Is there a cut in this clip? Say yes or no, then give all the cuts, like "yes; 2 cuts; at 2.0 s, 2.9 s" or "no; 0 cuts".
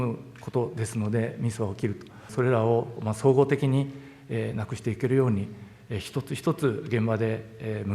yes; 1 cut; at 2.3 s